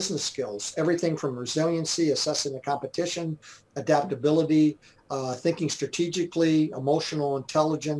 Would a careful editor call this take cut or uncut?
uncut